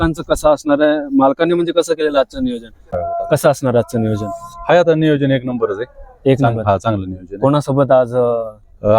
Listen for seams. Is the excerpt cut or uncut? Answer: cut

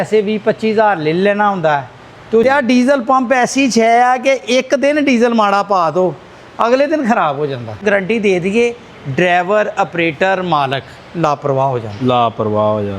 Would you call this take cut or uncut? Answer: cut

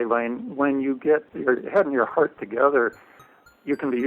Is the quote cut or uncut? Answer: cut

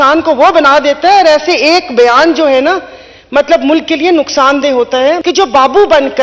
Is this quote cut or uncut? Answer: cut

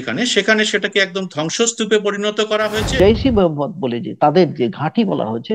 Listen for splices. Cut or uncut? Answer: cut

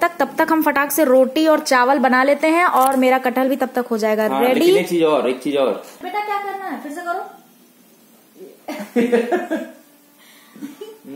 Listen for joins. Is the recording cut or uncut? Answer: cut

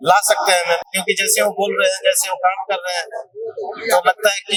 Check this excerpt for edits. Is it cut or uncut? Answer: uncut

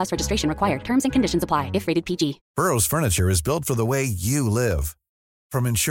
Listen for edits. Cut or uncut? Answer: cut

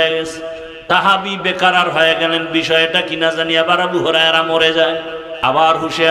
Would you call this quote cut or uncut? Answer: cut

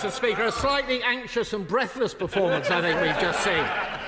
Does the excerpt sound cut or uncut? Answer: uncut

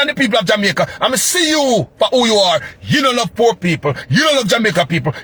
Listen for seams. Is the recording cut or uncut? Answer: uncut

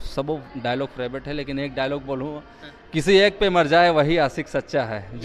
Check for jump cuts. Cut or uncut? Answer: uncut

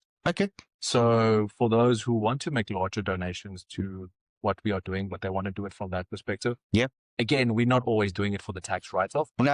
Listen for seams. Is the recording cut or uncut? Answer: uncut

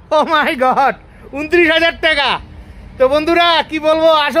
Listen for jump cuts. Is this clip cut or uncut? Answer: uncut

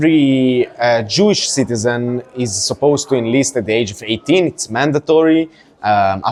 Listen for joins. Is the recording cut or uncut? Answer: uncut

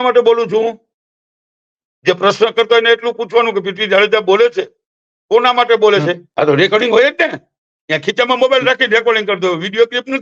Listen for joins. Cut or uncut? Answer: cut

